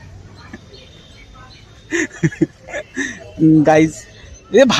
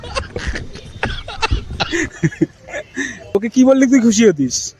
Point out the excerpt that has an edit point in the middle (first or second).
second